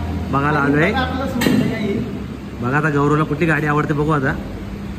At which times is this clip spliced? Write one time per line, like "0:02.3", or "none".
none